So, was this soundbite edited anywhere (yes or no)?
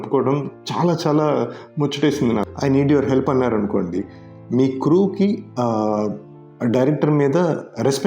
yes